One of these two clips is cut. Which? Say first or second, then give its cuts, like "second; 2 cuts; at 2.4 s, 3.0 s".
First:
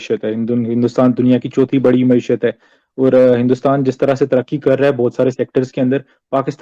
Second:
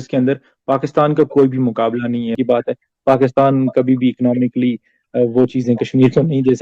second; 1 cut; at 2.3 s